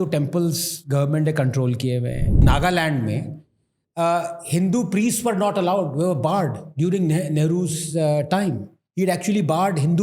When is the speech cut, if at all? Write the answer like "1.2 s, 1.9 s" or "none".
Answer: 2.4 s

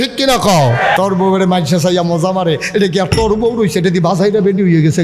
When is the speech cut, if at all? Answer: 1.0 s

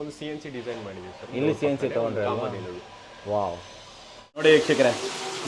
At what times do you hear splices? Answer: 4.4 s

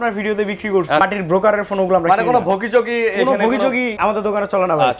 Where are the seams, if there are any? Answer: 1.0 s, 3.9 s

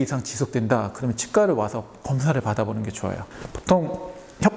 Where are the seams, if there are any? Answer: 3.2 s

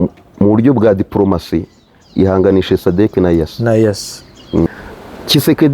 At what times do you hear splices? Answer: 4.7 s

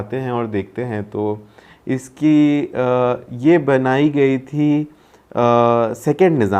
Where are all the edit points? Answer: none

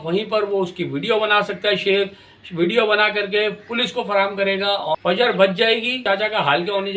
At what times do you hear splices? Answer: 4.9 s, 6.0 s

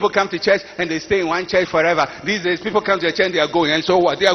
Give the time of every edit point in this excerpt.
none

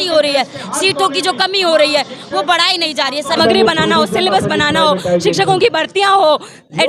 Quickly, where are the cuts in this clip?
3.4 s

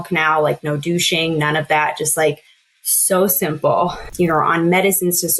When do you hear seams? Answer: 4.0 s

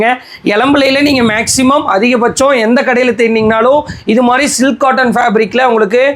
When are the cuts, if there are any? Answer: none

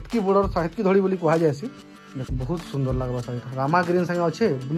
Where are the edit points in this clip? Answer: 2.3 s

